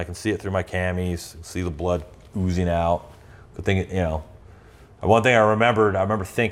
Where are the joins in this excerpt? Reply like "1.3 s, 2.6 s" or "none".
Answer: none

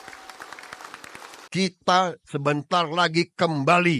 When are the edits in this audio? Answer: 1.4 s

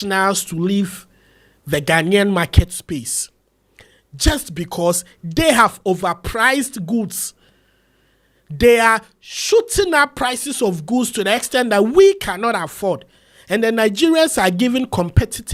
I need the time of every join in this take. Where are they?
none

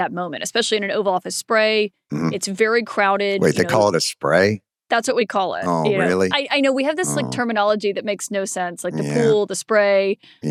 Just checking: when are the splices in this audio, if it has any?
none

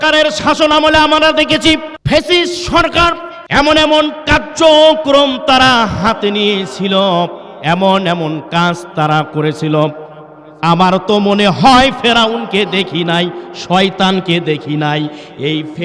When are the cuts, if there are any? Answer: 1.9 s, 3.3 s

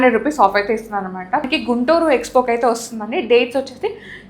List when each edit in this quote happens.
1.4 s

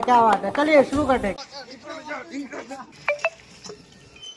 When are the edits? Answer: 1.4 s, 2.9 s

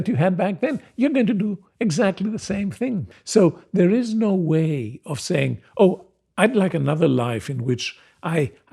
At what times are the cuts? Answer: 3.1 s

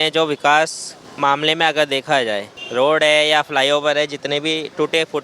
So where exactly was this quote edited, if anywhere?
1.0 s, 2.5 s

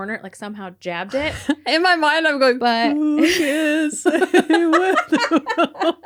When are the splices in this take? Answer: none

